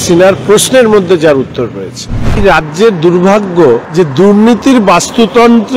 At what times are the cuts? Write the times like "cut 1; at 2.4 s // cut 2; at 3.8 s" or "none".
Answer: cut 1; at 2.4 s // cut 2; at 3.9 s